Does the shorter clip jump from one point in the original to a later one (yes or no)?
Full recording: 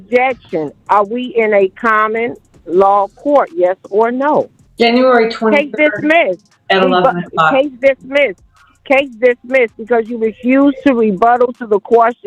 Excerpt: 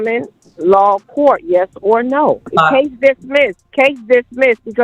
yes